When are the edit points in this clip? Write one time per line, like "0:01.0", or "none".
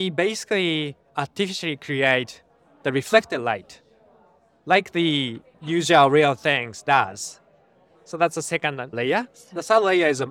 none